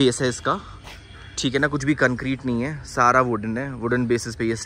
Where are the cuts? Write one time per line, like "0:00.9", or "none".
none